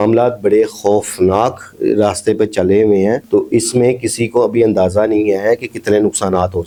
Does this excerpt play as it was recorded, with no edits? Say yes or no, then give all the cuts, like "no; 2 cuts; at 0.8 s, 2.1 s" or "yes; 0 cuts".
yes; 0 cuts